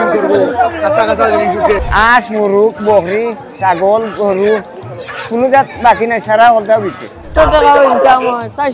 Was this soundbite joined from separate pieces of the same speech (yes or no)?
yes